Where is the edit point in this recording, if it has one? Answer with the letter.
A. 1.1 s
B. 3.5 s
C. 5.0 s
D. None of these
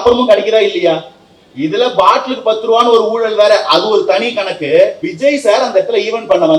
C